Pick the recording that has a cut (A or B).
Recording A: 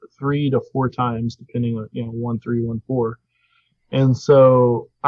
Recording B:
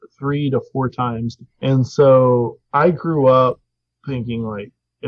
B